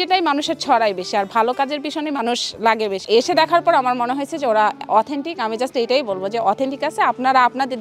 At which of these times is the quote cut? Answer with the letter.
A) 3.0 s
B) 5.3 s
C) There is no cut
A